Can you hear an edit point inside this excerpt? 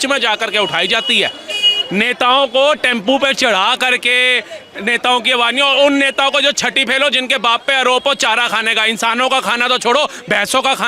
no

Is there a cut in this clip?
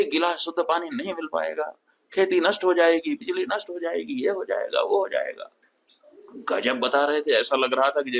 no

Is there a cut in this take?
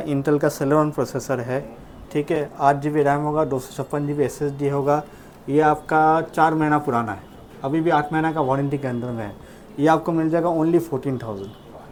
no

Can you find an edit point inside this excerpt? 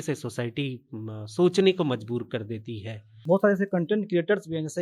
yes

